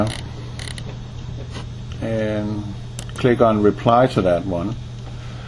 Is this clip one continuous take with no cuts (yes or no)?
yes